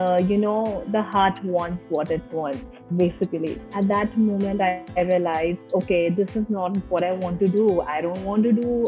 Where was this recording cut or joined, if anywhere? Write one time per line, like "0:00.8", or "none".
0:03.6